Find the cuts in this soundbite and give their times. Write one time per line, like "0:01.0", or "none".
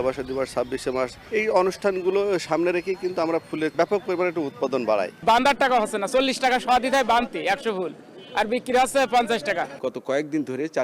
0:01.2
0:03.7
0:05.2
0:09.8